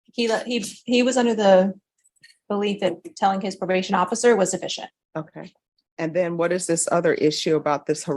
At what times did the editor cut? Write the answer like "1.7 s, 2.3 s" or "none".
6.8 s